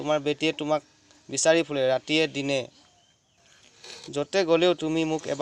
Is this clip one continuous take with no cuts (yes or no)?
yes